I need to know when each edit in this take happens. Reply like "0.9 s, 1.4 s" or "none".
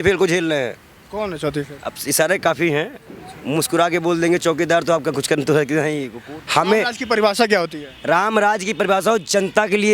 6.1 s